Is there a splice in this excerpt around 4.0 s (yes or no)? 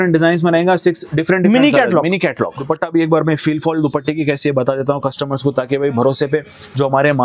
no